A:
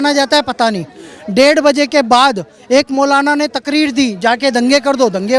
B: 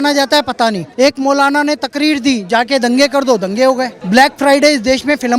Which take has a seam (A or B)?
B